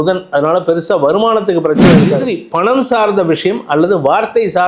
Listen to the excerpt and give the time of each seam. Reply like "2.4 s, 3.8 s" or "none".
2.2 s